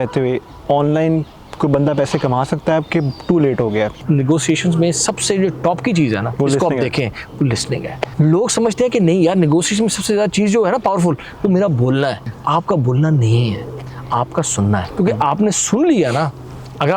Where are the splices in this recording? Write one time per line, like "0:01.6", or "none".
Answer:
0:04.0
0:06.3
0:08.0
0:12.3
0:14.9